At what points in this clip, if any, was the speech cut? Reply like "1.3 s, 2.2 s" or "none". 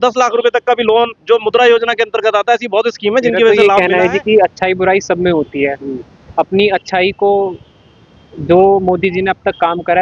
3.5 s